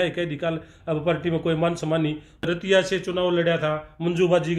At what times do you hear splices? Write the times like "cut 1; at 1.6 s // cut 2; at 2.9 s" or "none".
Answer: cut 1; at 2.5 s